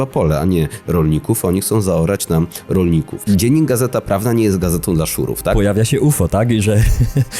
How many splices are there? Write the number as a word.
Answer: two